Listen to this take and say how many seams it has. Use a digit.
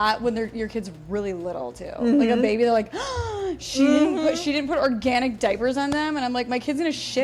0